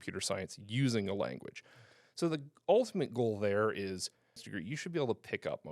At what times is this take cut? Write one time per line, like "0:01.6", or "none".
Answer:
0:04.5

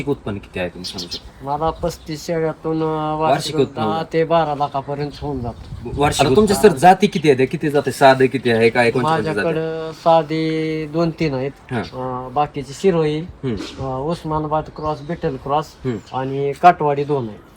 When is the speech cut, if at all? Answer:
0:06.1

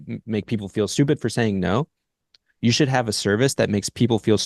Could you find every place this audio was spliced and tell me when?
none

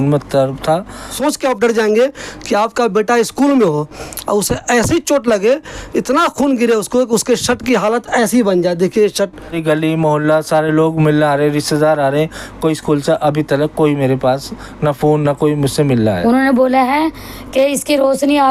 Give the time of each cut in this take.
0:01.1
0:09.6
0:16.2

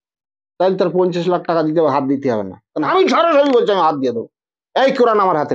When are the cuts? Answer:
0:02.9

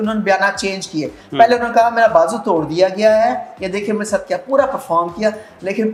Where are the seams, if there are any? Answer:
none

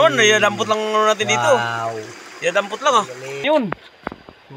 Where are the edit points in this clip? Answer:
0:03.4

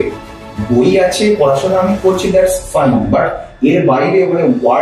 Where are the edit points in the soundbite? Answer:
none

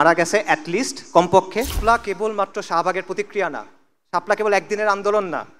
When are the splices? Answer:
0:01.8

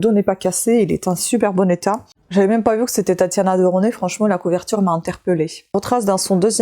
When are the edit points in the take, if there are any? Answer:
0:02.0
0:05.6

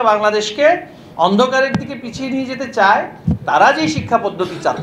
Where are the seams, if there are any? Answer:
none

